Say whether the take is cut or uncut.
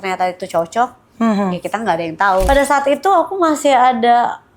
cut